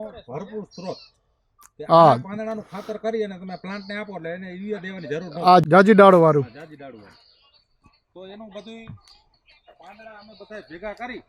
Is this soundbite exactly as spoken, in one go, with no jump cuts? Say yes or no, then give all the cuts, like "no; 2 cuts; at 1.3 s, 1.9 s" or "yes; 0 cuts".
no; 1 cut; at 5.6 s